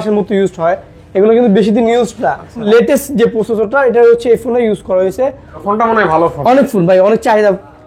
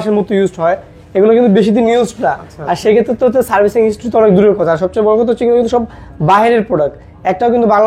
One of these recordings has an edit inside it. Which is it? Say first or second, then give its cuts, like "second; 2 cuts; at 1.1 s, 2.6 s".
first; 2 cuts; at 2.6 s, 5.6 s